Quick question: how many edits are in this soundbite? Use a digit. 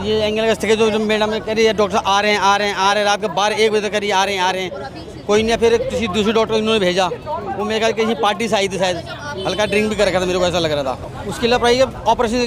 1